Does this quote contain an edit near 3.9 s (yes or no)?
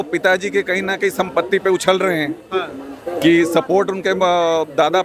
no